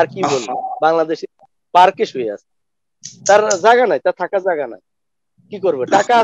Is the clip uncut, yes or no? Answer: yes